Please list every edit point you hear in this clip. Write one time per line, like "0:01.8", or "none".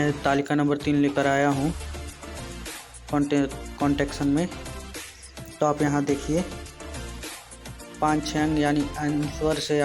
0:01.7
0:03.1
0:06.5
0:08.0